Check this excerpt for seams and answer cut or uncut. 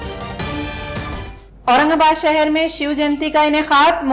cut